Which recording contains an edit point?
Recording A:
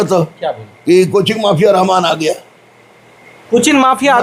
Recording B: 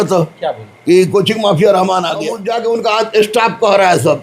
B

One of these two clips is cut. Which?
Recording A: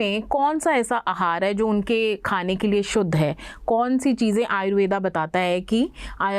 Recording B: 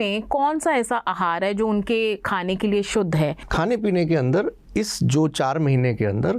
B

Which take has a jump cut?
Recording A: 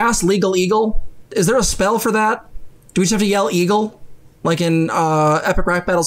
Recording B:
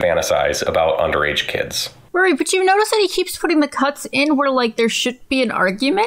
B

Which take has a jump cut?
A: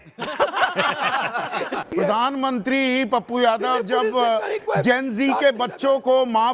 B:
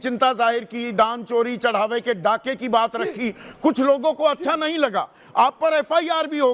A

